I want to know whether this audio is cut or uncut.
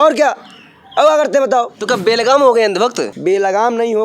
cut